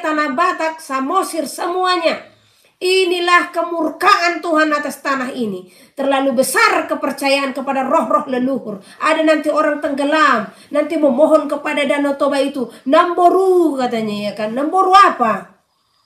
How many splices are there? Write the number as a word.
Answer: zero